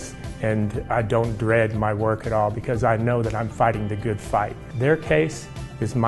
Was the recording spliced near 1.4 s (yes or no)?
no